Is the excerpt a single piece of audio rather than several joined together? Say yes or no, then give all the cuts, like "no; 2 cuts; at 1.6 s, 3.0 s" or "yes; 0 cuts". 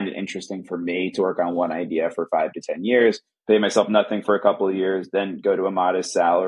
yes; 0 cuts